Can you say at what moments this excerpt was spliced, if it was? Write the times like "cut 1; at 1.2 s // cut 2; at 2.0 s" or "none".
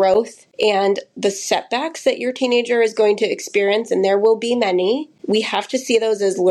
cut 1; at 5.1 s